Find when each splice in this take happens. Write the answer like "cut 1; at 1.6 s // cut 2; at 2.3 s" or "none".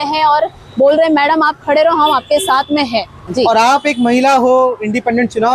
cut 1; at 3.2 s